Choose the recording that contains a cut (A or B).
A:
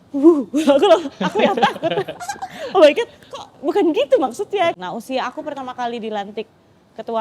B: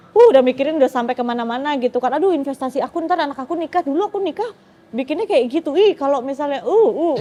A